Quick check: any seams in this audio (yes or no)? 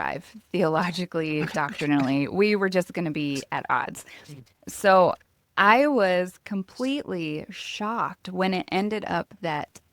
no